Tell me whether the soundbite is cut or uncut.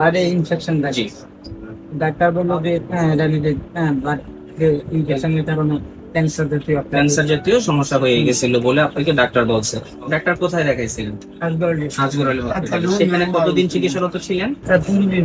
uncut